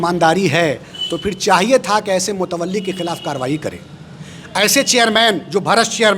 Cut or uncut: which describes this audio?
uncut